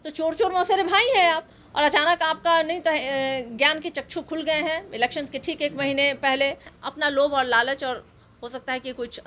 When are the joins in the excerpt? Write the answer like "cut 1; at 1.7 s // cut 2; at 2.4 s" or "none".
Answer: cut 1; at 1.6 s // cut 2; at 6.7 s